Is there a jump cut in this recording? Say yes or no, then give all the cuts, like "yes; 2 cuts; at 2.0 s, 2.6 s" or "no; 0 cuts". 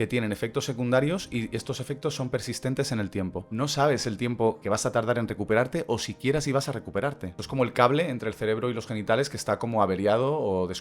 yes; 2 cuts; at 3.5 s, 7.4 s